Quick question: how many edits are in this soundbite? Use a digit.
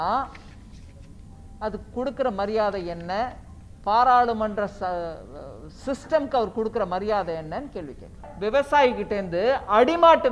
1